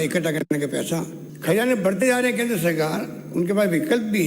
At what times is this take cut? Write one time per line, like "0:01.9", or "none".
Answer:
0:01.2